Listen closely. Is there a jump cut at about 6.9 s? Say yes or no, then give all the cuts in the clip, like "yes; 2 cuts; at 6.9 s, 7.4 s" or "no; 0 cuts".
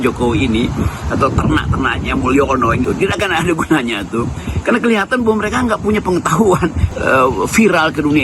yes; 2 cuts; at 2.8 s, 6.9 s